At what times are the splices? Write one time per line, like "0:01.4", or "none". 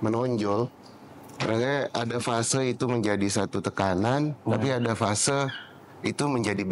none